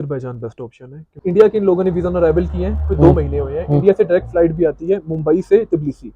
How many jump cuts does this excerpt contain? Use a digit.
1